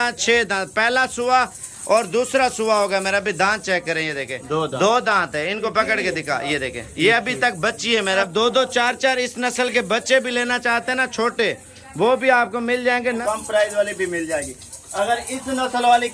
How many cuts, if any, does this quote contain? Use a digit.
2